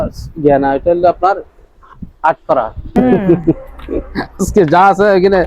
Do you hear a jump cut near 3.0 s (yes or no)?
yes